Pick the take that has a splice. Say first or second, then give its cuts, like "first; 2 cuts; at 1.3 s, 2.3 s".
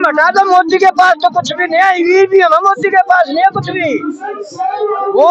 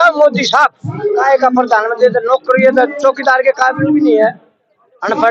second; 1 cut; at 1.2 s